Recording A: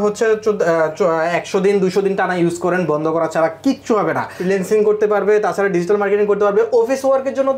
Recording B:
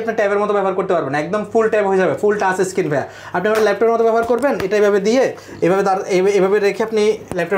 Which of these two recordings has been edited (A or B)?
A